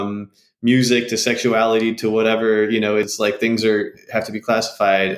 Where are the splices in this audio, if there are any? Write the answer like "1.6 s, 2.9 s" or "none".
3.1 s